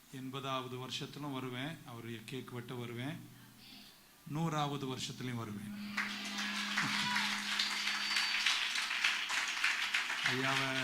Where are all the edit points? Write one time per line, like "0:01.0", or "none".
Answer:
none

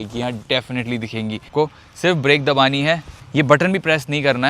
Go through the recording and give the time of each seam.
0:01.5

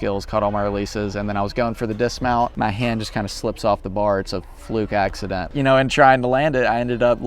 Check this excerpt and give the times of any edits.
0:02.5
0:05.5

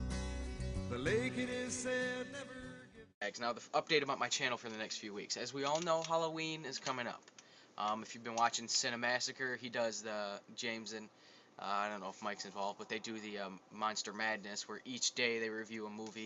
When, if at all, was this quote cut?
none

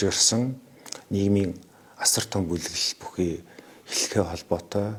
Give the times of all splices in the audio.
none

